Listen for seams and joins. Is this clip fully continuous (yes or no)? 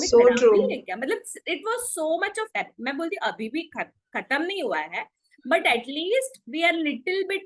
yes